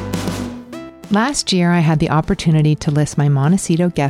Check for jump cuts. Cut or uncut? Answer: cut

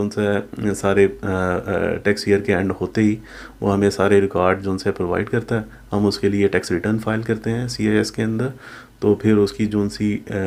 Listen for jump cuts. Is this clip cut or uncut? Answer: uncut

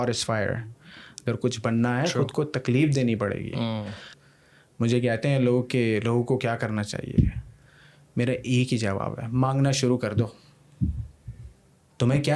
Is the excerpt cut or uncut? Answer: cut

